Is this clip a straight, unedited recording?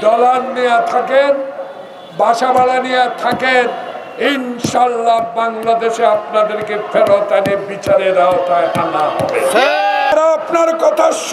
no; 1 cut; at 10.1 s

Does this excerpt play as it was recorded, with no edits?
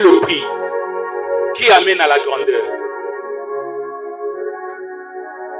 yes; 0 cuts

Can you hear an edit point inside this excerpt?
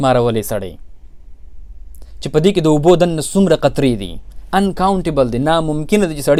no; 0 cuts

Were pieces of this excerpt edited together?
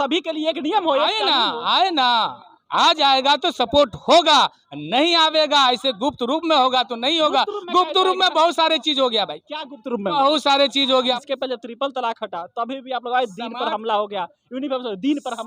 yes; 1 cut; at 11.2 s

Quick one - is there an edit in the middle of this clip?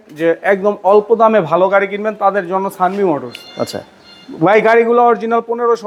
no; 0 cuts

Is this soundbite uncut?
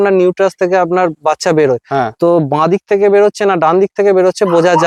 yes; 0 cuts

